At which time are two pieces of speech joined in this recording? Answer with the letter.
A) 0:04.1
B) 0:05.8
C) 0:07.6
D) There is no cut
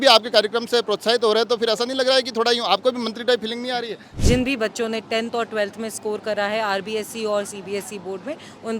A